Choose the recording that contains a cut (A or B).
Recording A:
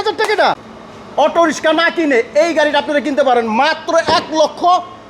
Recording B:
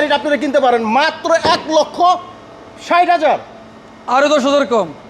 A